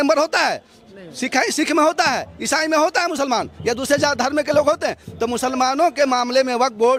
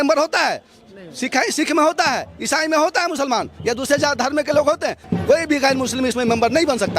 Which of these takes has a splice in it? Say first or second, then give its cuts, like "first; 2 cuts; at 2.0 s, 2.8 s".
second; 1 cut; at 5.0 s